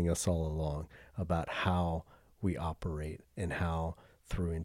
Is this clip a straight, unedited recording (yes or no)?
yes